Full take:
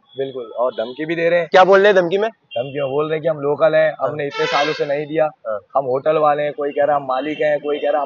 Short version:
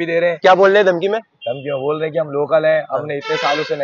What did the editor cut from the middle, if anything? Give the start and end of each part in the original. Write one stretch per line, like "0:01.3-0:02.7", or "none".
none